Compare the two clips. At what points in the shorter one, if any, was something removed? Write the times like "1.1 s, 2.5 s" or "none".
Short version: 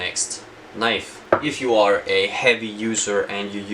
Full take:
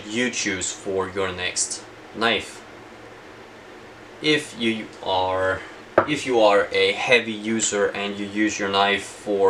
1.1 s

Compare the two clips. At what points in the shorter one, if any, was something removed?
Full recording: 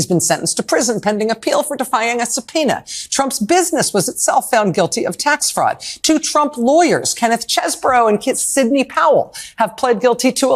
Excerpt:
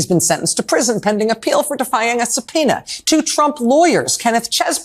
2.9 s

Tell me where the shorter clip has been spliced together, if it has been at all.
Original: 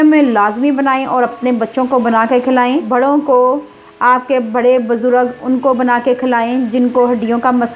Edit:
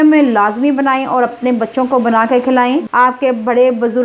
2.9 s

